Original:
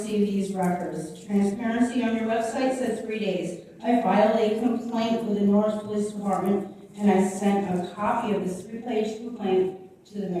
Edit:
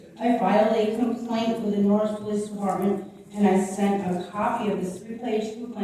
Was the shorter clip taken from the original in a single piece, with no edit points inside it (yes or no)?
yes